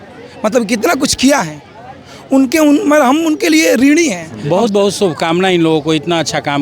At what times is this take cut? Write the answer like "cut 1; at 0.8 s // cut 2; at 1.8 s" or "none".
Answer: cut 1; at 4.3 s